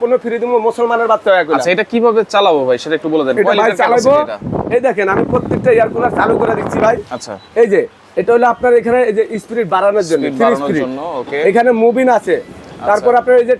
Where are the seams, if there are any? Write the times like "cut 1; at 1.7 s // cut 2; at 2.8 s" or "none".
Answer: none